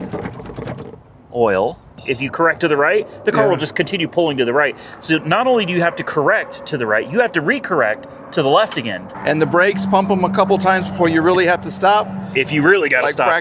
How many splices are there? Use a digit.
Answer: 2